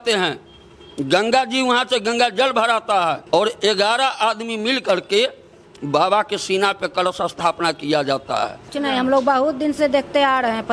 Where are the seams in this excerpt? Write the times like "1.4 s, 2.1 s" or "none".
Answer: 3.2 s, 8.7 s